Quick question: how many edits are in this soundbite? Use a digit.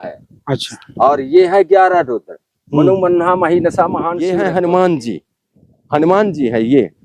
1